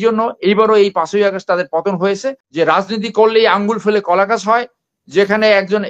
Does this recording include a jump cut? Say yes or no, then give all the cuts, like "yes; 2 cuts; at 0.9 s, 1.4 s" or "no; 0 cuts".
yes; 1 cut; at 2.4 s